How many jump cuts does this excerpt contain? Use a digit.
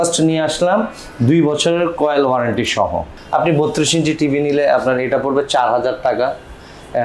1